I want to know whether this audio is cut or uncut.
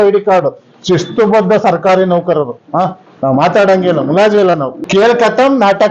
cut